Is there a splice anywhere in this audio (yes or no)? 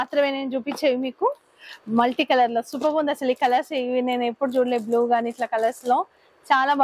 no